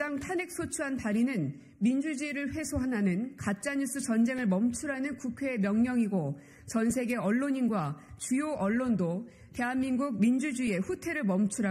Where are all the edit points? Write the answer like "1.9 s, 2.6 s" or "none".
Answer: none